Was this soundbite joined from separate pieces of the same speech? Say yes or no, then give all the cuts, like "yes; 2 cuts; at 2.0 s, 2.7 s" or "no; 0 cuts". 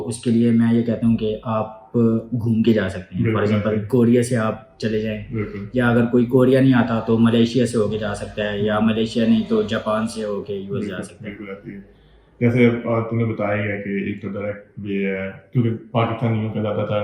no; 0 cuts